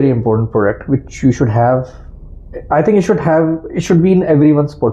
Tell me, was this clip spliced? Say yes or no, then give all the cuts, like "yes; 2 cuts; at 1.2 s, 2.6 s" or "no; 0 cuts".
no; 0 cuts